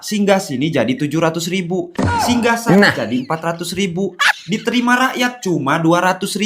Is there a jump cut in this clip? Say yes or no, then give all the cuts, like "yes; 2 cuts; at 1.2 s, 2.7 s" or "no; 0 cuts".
no; 0 cuts